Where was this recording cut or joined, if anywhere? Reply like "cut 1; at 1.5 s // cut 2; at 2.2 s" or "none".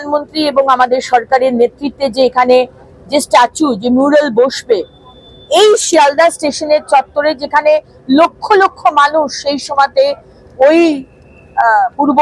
none